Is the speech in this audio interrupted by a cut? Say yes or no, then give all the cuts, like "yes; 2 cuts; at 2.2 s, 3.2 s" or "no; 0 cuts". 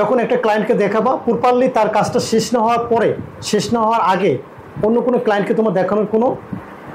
no; 0 cuts